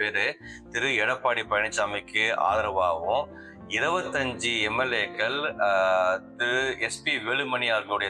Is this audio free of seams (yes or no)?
yes